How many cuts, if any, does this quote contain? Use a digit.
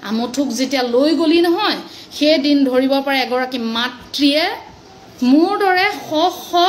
0